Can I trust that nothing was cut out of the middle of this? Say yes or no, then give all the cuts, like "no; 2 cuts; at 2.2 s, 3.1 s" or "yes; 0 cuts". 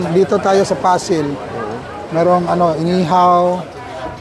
yes; 0 cuts